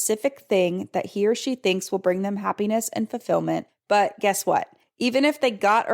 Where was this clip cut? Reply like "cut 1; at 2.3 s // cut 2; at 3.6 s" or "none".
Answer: cut 1; at 3.7 s // cut 2; at 4.8 s